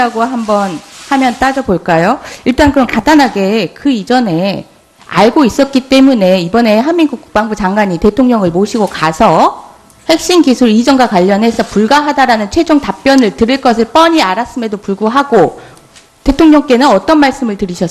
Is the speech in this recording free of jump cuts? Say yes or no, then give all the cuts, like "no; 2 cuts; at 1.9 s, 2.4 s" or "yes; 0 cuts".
no; 1 cut; at 1.9 s